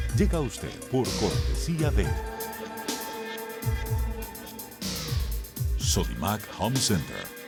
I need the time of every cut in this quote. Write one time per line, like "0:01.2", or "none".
none